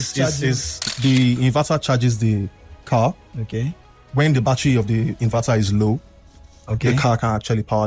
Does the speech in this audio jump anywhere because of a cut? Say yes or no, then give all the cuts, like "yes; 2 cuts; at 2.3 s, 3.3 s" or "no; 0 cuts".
yes; 1 cut; at 0.9 s